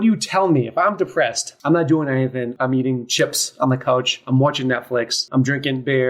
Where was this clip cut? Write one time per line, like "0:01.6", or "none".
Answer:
0:01.5
0:02.5
0:05.2